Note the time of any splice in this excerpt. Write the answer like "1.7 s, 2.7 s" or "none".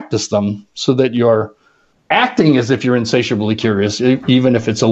none